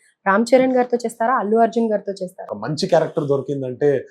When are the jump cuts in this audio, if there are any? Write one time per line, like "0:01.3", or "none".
0:02.5